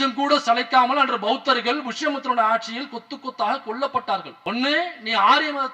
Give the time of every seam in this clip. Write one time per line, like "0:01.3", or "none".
0:04.3